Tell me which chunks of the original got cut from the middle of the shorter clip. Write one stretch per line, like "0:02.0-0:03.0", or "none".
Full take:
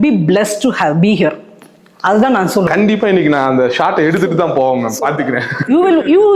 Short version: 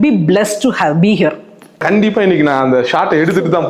0:01.8-0:02.7

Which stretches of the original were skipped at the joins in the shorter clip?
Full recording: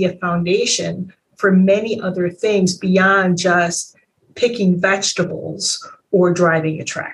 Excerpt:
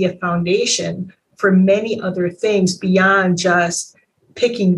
none

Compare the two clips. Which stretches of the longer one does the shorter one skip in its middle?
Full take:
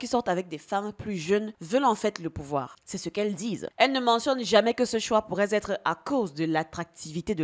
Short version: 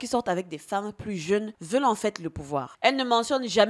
0:02.7-0:03.7

